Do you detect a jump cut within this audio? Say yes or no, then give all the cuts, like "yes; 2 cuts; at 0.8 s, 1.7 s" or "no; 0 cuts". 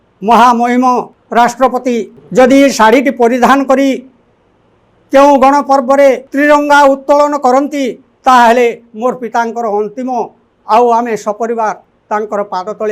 yes; 3 cuts; at 1.2 s, 2.2 s, 6.3 s